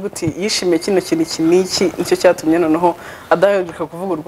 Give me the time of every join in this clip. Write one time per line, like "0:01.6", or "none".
none

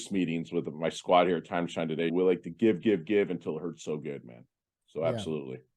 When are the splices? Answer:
0:02.1

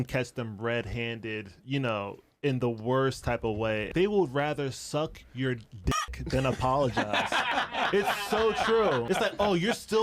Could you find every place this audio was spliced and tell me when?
0:03.9
0:07.5
0:09.0

